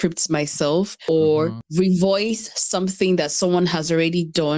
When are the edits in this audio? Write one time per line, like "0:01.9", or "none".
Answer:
0:01.0
0:01.6